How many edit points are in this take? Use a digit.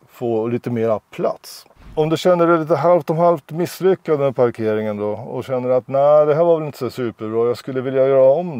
1